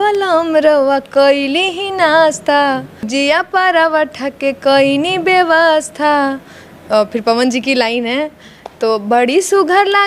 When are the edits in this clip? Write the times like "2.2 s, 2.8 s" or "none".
3.1 s

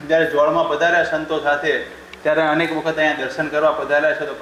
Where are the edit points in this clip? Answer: none

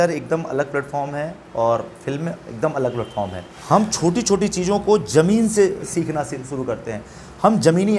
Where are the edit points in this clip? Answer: 3.5 s

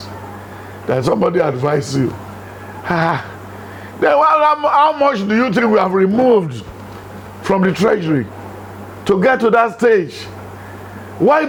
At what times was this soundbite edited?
none

